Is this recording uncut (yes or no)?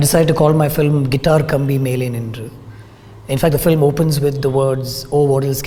yes